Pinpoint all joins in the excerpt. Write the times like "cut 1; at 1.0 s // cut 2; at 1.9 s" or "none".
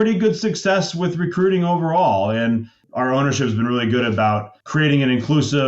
cut 1; at 2.8 s // cut 2; at 4.6 s